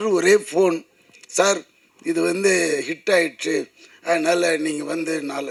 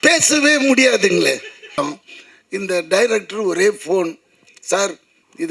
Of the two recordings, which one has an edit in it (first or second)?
second